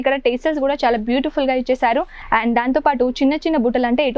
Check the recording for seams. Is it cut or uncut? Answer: cut